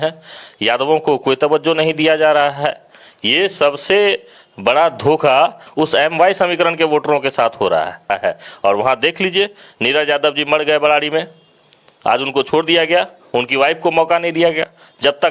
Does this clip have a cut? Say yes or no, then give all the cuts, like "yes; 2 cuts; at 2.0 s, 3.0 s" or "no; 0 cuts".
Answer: yes; 1 cut; at 8.1 s